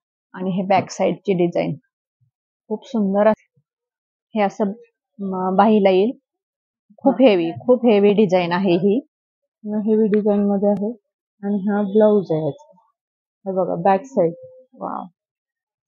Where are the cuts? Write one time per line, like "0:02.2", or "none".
0:03.4